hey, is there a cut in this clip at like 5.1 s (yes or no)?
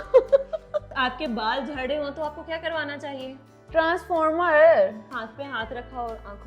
yes